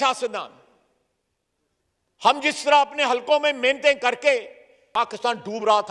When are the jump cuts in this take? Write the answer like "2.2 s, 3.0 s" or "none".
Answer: 4.8 s